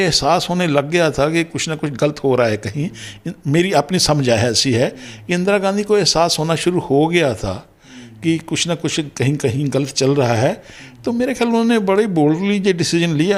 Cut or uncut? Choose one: uncut